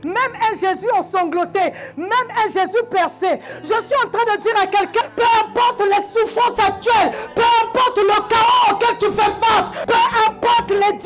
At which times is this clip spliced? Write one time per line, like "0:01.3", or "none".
0:03.5
0:05.0
0:07.2
0:09.8

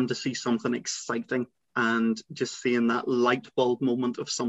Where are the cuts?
0:01.7

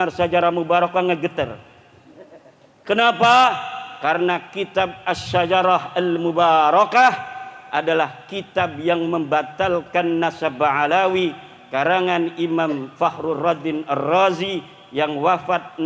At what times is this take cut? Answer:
none

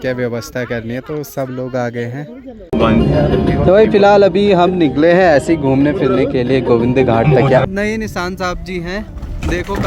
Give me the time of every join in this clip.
0:02.5
0:07.6

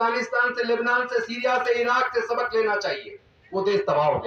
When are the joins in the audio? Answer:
none

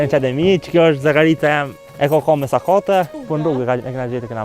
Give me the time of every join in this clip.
0:01.8
0:03.2

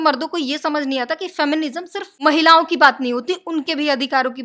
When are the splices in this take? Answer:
0:02.0

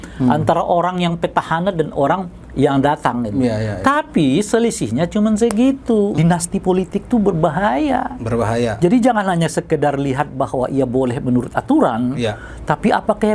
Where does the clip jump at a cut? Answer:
0:06.1

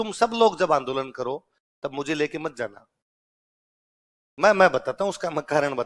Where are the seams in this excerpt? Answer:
none

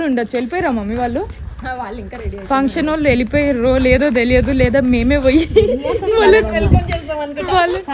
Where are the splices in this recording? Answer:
none

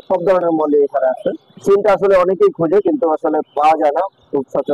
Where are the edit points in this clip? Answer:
0:01.5

